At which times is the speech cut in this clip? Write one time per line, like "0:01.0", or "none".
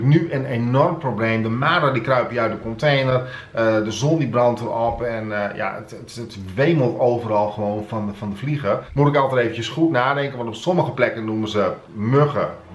none